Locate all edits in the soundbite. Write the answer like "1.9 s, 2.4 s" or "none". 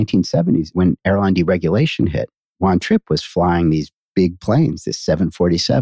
0.7 s, 2.4 s